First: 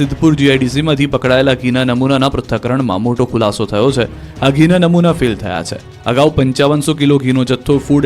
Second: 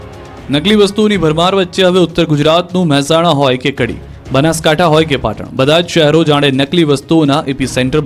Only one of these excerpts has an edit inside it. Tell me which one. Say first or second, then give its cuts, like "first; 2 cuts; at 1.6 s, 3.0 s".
first; 1 cut; at 7.1 s